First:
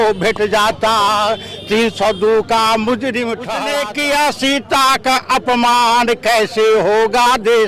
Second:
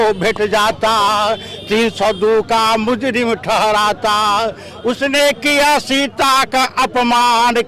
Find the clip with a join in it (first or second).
first